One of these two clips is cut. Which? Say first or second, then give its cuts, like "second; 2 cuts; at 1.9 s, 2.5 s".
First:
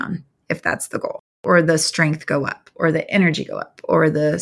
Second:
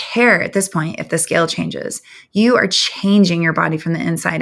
first; 1 cut; at 1.4 s